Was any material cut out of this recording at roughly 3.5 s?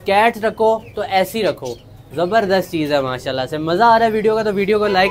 no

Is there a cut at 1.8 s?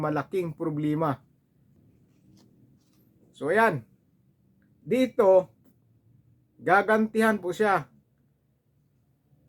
yes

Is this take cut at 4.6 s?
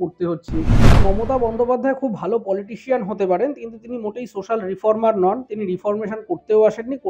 no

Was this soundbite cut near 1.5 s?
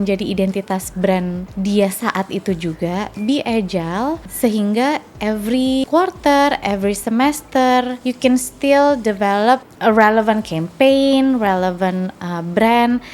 yes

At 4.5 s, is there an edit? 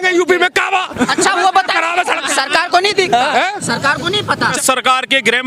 yes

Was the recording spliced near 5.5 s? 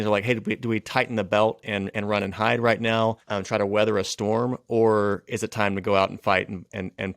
no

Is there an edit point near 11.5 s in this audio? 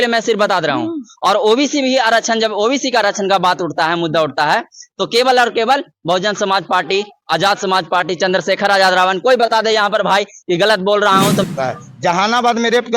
yes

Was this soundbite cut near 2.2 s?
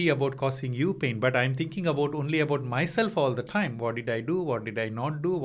no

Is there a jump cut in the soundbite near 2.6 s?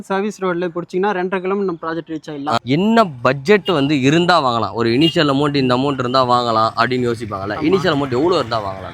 yes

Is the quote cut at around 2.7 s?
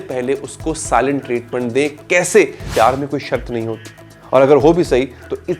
yes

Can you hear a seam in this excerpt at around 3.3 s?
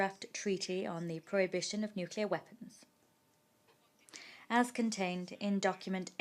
no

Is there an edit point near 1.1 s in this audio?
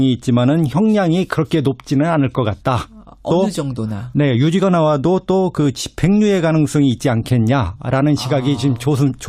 no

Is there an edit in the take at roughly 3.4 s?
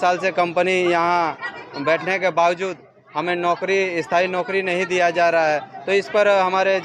no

